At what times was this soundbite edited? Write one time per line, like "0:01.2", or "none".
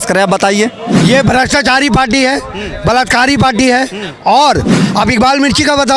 0:00.9
0:04.8